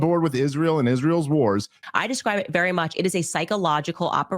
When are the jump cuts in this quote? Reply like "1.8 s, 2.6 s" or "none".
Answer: 1.8 s